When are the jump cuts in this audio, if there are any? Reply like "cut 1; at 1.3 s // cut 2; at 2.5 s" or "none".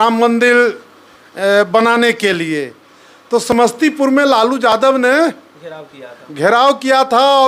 none